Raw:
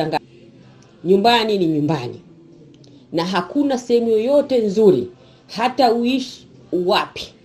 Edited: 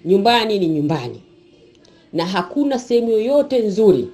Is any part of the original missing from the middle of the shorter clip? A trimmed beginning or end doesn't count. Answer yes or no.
no